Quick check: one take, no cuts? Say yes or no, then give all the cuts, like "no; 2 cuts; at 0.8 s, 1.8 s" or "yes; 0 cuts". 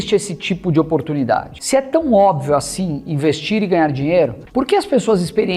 no; 2 cuts; at 1.5 s, 4.4 s